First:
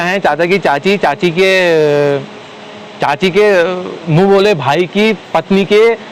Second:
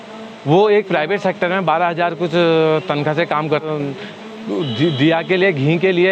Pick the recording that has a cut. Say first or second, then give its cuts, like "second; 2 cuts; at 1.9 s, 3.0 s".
second; 1 cut; at 3.7 s